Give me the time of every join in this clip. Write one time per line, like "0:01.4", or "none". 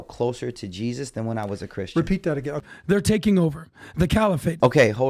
0:02.7